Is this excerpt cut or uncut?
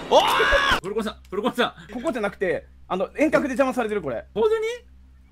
cut